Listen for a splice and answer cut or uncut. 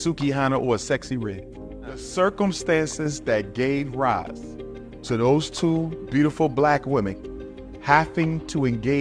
cut